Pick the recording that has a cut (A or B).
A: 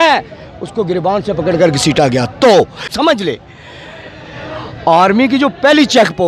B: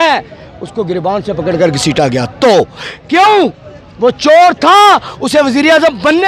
A